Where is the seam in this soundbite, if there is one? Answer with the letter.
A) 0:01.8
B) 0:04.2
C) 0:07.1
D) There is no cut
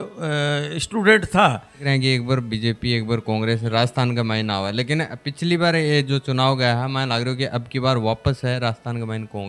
A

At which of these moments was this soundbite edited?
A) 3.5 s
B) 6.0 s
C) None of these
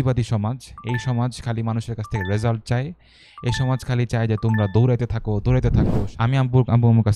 B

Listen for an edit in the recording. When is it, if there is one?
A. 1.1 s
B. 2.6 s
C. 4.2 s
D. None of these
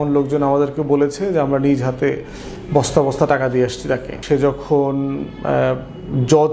C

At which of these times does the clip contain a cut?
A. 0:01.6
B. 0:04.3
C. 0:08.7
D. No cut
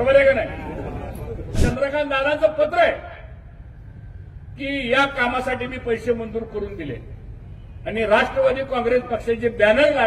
A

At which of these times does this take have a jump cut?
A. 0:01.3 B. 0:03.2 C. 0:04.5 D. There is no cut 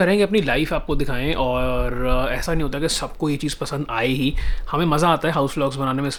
D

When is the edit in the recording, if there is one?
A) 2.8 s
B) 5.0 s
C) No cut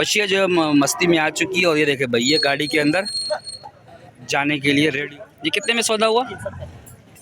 B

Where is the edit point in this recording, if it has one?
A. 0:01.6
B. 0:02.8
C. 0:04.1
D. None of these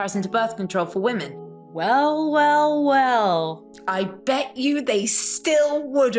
A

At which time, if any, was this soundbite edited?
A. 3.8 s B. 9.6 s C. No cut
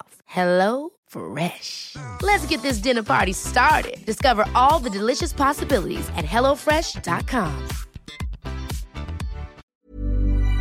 B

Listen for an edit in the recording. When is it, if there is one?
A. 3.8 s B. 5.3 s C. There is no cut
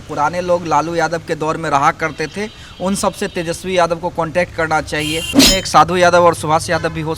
B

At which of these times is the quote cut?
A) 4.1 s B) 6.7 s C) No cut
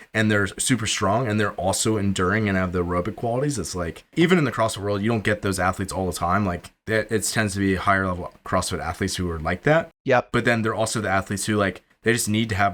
A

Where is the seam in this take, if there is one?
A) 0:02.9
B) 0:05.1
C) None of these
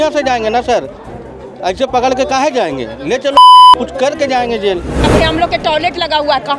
B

